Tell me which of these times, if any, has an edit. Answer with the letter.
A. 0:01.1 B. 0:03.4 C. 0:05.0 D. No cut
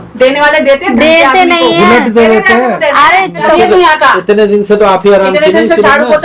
B